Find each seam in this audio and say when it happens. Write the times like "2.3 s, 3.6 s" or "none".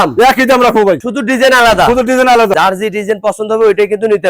1.1 s, 2.5 s